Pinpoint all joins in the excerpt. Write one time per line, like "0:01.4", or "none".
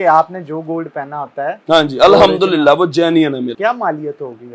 0:03.5